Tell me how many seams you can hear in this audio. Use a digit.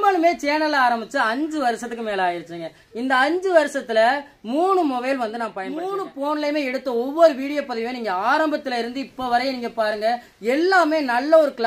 1